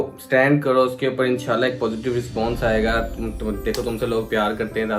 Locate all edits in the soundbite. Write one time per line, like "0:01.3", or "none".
none